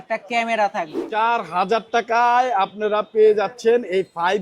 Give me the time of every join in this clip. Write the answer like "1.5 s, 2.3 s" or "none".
1.0 s

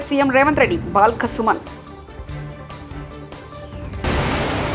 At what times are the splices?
none

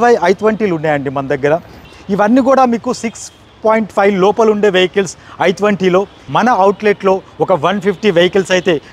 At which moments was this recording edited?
1.9 s, 6.2 s

